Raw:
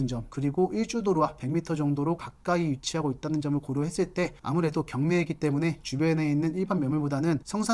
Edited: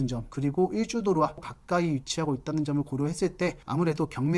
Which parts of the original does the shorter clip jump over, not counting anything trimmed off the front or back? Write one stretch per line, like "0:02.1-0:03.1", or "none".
0:01.4-0:02.2